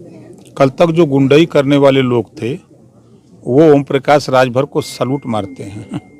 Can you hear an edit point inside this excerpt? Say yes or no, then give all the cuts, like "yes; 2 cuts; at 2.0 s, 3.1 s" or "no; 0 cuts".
no; 0 cuts